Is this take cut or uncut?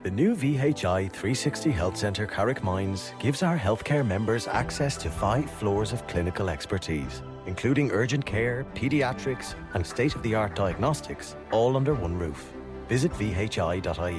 uncut